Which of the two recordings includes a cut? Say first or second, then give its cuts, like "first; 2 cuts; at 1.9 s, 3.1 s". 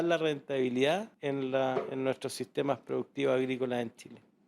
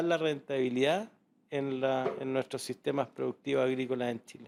first; 1 cut; at 1.1 s